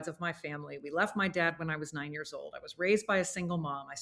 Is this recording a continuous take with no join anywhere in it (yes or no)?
yes